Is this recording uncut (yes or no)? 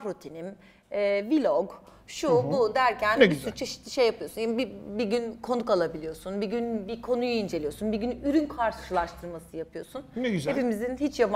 yes